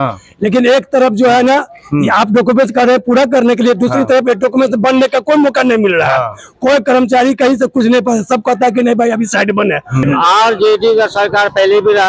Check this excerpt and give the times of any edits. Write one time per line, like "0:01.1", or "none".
0:10.0